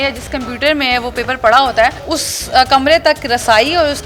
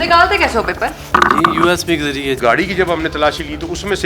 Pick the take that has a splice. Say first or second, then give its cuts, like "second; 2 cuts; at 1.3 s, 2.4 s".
second; 1 cut; at 2.4 s